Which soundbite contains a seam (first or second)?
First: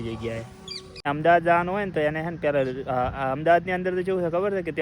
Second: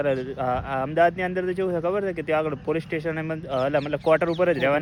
first